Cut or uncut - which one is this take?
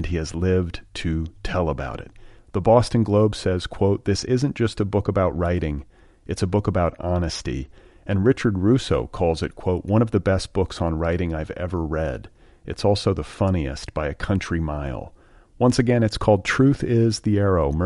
uncut